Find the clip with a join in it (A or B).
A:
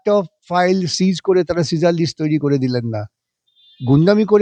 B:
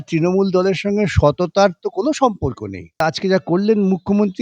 B